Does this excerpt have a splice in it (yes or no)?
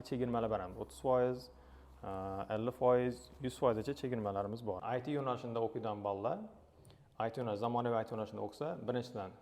yes